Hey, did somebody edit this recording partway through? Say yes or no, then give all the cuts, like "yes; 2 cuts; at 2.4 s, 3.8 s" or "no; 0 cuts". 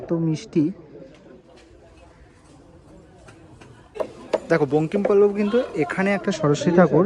no; 0 cuts